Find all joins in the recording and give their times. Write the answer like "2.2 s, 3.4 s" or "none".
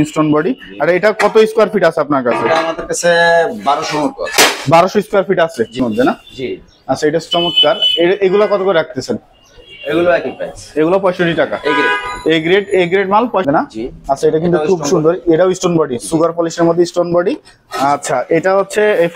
5.8 s, 13.5 s